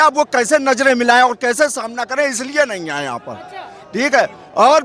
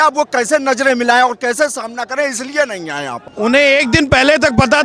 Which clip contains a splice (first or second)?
second